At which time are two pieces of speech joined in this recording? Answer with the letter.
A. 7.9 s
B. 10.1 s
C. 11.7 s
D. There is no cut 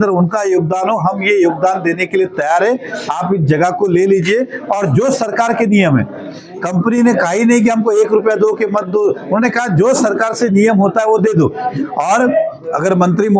C